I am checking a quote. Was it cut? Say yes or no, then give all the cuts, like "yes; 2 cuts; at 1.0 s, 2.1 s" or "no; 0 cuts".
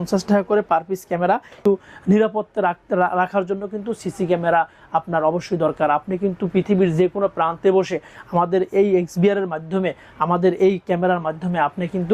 yes; 1 cut; at 1.5 s